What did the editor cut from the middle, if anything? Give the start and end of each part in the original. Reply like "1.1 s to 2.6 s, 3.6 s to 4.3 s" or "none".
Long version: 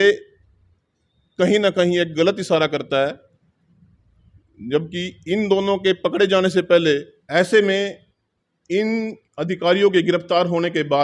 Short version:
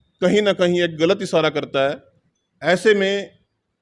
3.6 s to 7.1 s

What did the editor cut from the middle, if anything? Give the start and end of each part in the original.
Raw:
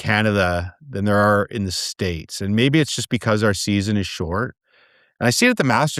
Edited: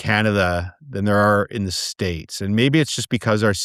none

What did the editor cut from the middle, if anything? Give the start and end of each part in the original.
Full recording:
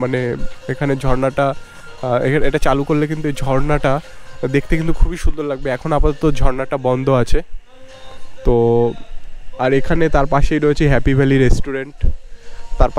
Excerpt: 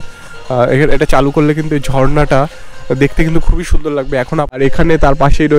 6.0 s to 9.6 s

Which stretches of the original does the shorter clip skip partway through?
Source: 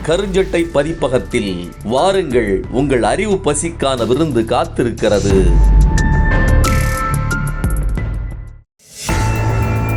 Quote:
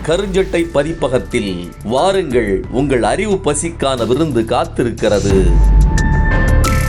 none

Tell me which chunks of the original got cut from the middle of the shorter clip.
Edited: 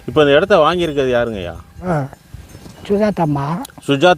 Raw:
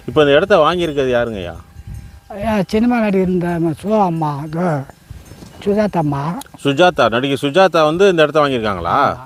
1.7 s to 4.5 s

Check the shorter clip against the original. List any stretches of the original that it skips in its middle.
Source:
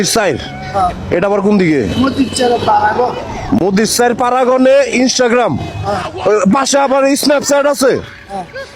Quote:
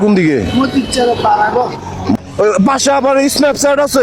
3.6 s to 6.0 s

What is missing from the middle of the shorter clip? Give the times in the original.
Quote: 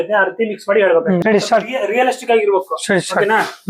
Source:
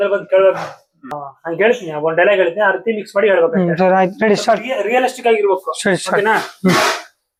3.7 s to 4.2 s

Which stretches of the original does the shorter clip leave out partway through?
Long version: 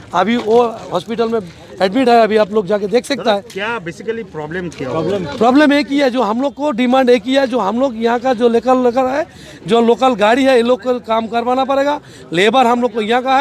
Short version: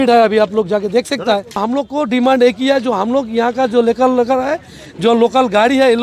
3.6 s to 6.3 s

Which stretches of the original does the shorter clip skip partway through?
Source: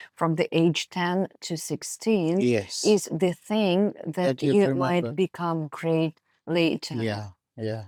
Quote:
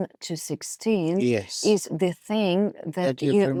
none

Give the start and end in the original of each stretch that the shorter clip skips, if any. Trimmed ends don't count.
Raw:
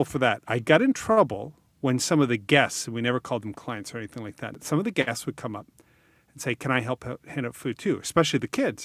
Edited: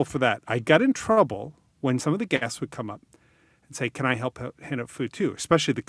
2.0 s to 4.7 s

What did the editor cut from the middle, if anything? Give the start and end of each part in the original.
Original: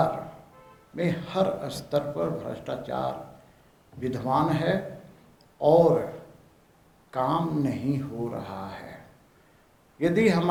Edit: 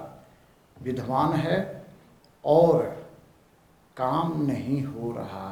none

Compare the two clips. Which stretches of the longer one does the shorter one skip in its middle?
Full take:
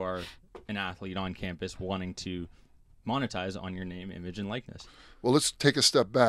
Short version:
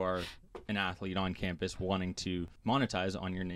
2.5 s to 2.9 s

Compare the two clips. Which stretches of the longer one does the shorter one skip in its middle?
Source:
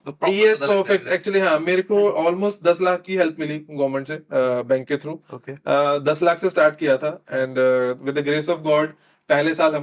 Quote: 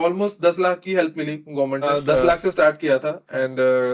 4.1 s to 5.8 s

